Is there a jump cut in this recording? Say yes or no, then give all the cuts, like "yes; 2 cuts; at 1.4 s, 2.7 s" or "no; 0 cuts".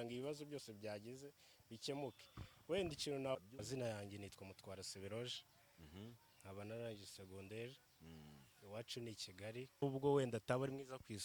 yes; 2 cuts; at 3.5 s, 9.8 s